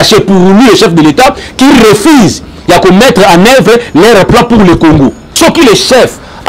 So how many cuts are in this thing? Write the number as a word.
one